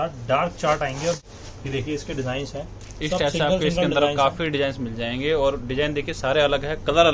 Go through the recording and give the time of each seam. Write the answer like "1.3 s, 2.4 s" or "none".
1.2 s